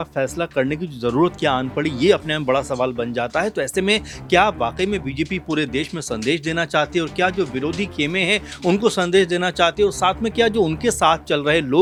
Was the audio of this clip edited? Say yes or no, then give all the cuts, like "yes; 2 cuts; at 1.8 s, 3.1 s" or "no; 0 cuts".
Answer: no; 0 cuts